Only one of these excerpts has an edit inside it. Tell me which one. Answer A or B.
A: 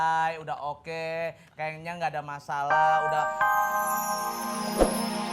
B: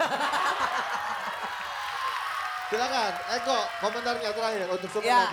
A